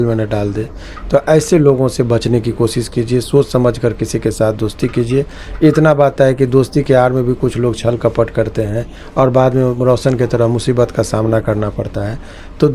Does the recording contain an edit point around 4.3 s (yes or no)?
no